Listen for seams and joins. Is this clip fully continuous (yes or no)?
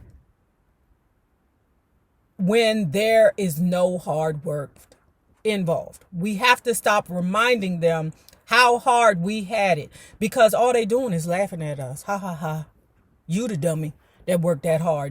no